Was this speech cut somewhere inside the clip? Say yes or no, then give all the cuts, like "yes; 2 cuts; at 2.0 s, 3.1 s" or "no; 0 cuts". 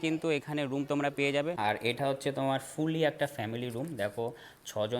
yes; 1 cut; at 1.6 s